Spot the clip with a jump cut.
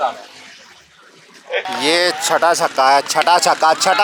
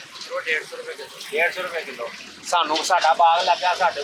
first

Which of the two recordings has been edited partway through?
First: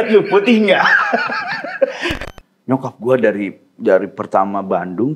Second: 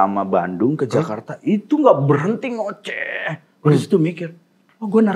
first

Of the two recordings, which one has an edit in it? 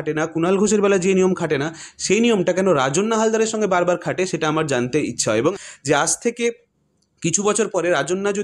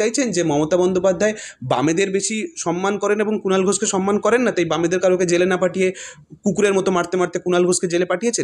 first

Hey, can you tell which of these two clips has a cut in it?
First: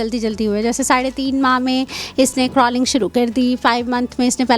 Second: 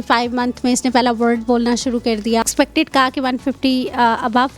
second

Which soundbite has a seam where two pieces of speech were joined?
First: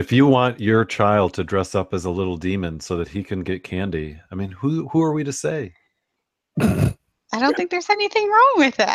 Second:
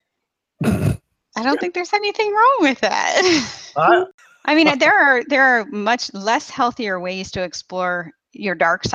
second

